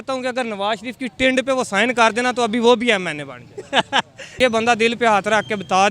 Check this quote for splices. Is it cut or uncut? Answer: cut